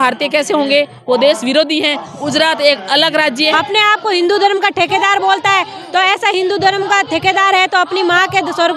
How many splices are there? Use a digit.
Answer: 1